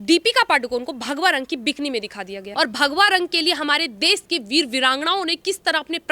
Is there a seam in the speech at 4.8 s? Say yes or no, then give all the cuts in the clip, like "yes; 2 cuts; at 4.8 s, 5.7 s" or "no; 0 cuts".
no; 1 cut; at 2.4 s